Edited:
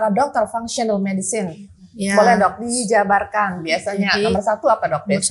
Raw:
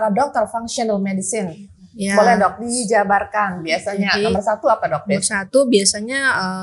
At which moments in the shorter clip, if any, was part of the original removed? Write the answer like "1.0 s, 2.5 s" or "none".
none